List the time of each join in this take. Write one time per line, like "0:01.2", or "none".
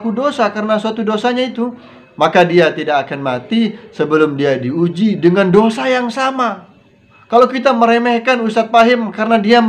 none